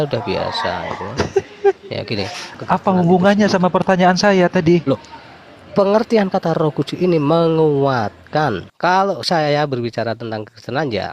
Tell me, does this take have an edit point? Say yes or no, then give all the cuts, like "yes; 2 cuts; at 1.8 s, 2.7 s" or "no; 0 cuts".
yes; 2 cuts; at 2.6 s, 8.7 s